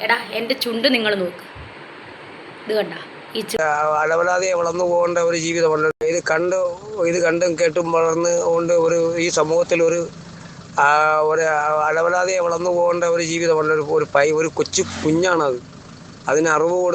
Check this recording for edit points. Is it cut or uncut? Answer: cut